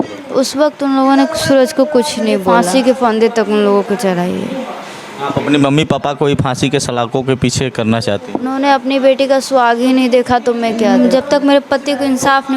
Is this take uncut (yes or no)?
no